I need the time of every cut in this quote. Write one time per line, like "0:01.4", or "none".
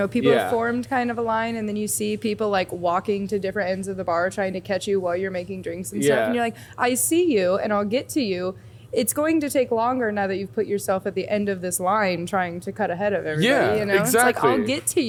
none